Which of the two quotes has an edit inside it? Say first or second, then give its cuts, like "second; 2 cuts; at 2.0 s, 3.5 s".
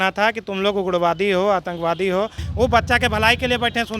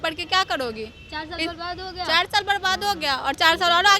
first; 1 cut; at 2.4 s